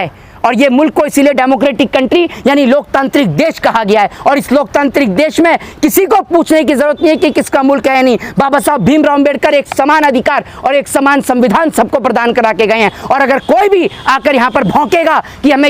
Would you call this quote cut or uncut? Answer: uncut